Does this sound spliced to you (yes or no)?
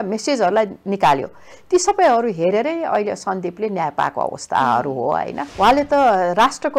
yes